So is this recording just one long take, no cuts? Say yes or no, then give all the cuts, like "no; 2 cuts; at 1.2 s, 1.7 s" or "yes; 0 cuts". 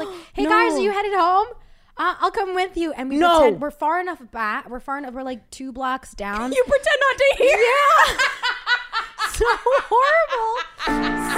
yes; 0 cuts